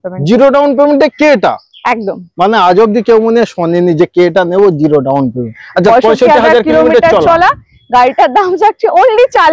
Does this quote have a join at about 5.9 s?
yes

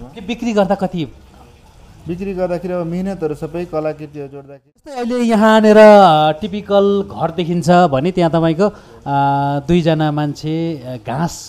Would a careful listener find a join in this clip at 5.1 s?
yes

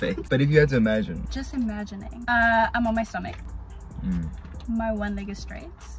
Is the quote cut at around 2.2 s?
yes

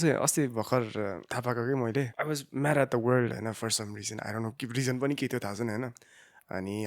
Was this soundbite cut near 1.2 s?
yes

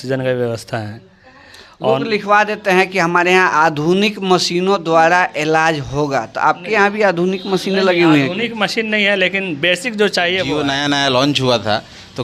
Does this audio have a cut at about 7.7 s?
no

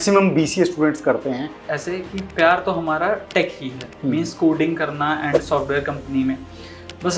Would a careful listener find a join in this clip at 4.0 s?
no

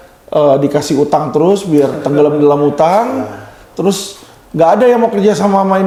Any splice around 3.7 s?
no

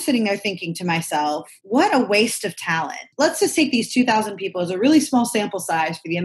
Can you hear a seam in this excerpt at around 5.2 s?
no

